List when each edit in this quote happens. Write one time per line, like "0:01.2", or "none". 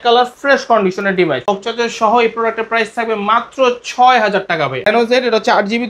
0:01.4
0:04.9